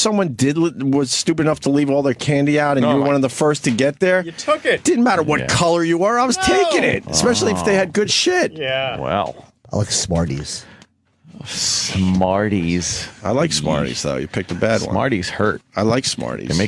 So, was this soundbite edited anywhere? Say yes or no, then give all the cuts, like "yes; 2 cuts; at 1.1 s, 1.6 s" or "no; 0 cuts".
no; 0 cuts